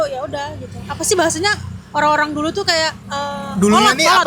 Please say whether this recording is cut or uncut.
cut